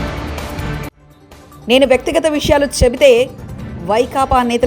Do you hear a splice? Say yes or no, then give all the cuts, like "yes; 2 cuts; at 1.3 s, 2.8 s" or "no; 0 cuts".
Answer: yes; 1 cut; at 1.0 s